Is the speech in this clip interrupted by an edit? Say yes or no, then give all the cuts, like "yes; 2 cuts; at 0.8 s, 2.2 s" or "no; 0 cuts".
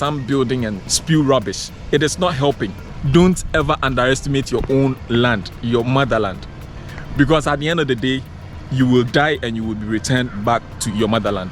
yes; 1 cut; at 2.9 s